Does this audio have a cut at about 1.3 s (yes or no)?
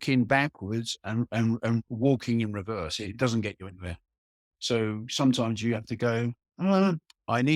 no